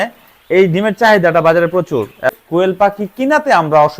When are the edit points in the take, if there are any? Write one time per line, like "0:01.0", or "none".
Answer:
0:02.3